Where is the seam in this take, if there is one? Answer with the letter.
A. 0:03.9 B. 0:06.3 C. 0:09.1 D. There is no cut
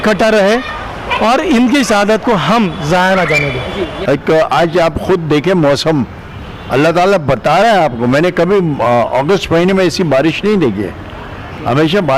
A